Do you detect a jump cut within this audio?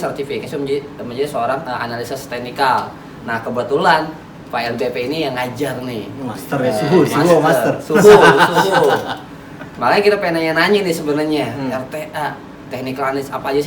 no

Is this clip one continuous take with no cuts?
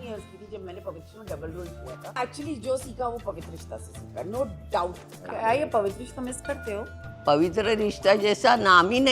no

